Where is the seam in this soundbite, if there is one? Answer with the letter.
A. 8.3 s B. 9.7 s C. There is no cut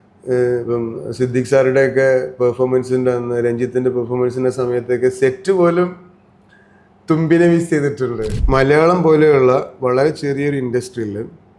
A